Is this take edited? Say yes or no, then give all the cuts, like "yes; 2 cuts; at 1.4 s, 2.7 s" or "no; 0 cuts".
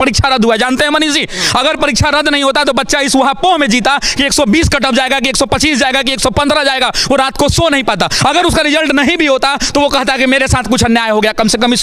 no; 0 cuts